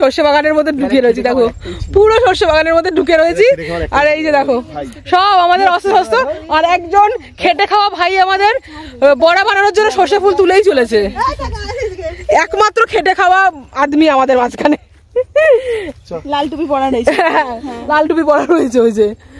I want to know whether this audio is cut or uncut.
uncut